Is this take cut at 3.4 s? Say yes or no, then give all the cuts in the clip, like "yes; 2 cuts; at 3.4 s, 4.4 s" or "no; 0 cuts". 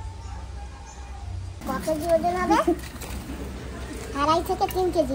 no; 1 cut; at 1.6 s